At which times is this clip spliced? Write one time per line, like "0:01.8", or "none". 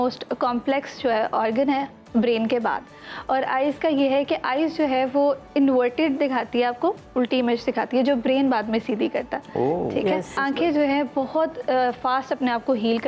0:10.4